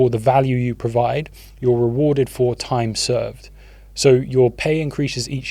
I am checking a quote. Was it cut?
no; 0 cuts

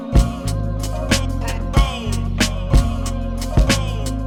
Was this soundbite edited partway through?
no; 0 cuts

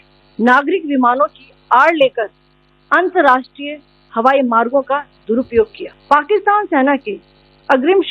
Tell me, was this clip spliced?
yes; 1 cut; at 5.9 s

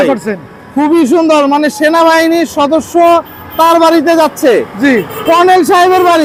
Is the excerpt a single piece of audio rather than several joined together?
yes; 0 cuts

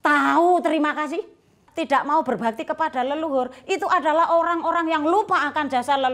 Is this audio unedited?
no; 1 cut; at 1.6 s

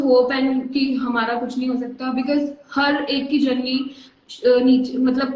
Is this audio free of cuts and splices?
yes; 0 cuts

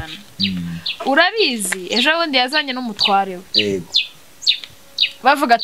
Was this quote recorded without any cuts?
yes; 0 cuts

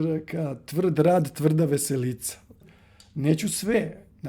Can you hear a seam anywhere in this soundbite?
yes; 1 cut; at 2.7 s

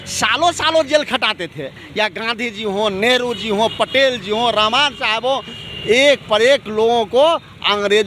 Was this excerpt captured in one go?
yes; 0 cuts

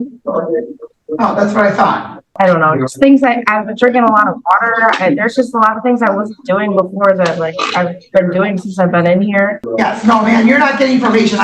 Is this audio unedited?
no; 2 cuts; at 2.3 s, 9.6 s

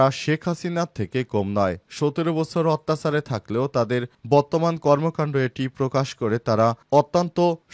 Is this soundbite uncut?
yes; 0 cuts

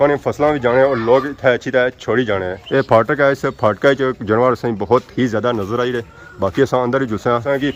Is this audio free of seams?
yes; 0 cuts

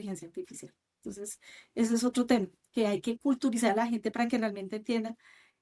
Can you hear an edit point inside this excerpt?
no; 0 cuts

